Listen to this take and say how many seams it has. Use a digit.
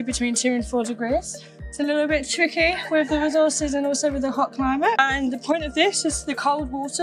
0